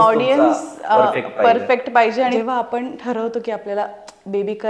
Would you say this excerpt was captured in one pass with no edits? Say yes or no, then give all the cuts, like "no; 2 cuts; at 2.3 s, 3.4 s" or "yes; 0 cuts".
no; 1 cut; at 2.4 s